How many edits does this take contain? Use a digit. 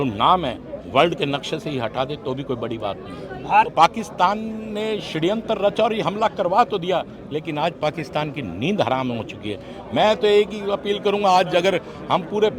1